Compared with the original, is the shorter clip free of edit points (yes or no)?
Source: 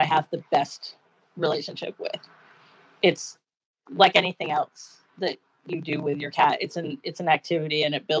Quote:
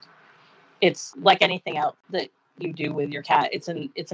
no